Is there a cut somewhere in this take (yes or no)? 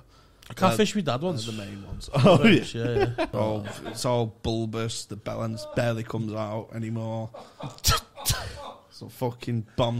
yes